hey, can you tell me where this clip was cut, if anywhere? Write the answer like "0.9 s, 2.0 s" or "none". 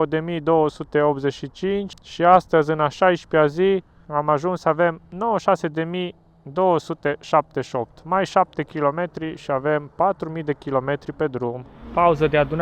1.9 s, 4.0 s, 11.7 s